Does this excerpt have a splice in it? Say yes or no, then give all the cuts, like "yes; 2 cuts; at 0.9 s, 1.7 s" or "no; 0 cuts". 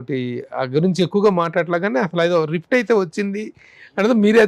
no; 0 cuts